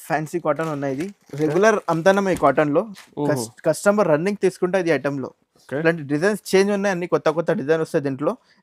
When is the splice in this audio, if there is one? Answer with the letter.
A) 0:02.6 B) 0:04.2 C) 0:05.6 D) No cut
D